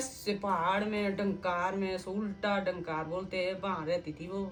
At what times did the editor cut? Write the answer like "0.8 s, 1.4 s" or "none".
none